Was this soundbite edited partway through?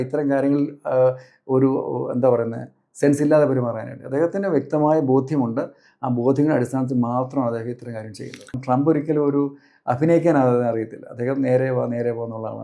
yes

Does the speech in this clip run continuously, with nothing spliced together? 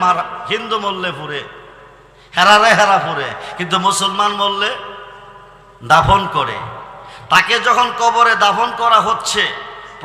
yes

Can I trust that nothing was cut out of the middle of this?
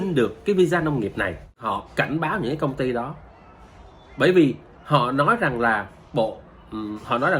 no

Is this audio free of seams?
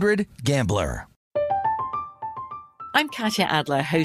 no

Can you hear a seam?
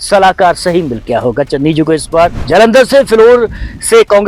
yes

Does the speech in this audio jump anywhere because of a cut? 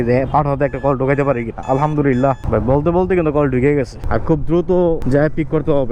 yes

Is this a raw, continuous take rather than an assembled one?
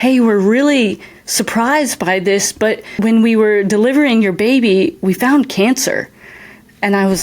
no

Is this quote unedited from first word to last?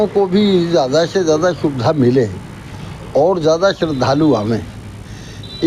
yes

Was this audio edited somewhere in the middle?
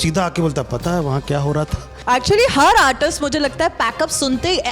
yes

